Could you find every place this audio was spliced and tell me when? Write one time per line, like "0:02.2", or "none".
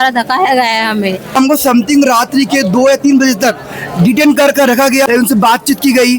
0:01.4
0:05.1